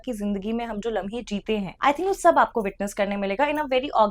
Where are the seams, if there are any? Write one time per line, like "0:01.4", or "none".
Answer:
0:01.7